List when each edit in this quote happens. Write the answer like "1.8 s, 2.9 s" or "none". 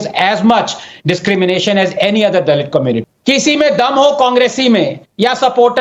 3.0 s